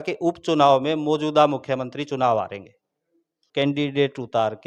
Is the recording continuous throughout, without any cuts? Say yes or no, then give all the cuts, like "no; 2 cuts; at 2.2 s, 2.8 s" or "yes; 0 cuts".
yes; 0 cuts